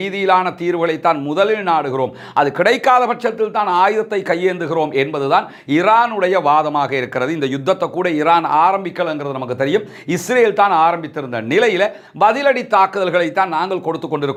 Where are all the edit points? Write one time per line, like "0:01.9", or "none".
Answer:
none